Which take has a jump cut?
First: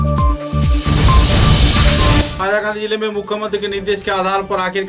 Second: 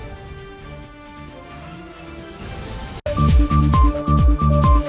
first; 1 cut; at 2.3 s

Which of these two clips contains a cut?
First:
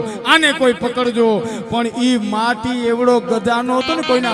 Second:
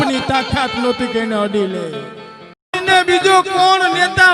second; 1 cut; at 2.8 s

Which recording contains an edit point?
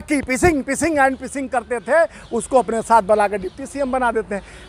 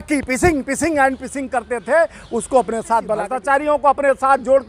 second; 1 cut; at 3.2 s

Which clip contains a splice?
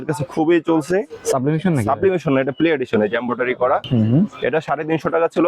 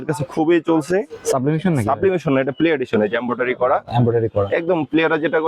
first; 1 cut; at 3.8 s

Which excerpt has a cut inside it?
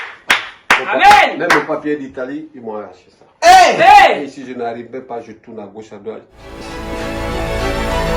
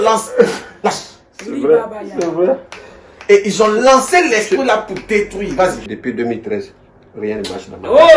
first; 1 cut; at 6.4 s

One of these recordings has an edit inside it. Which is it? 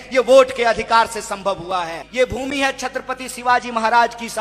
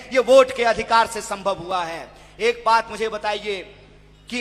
first; 1 cut; at 2.0 s

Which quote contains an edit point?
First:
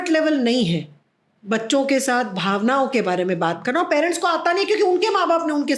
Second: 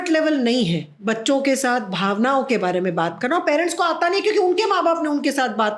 second; 1 cut; at 0.9 s

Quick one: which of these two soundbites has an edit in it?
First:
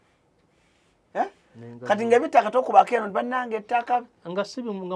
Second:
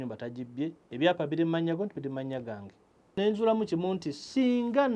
second; 1 cut; at 3.1 s

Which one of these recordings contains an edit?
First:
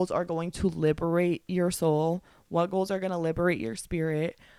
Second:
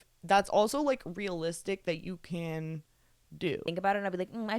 second; 1 cut; at 3.7 s

